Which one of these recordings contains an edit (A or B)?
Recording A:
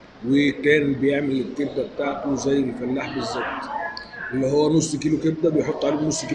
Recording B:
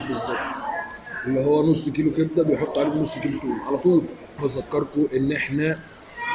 B